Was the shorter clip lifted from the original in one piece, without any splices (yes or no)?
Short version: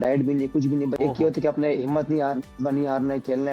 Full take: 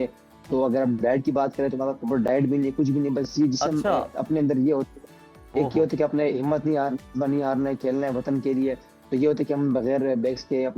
no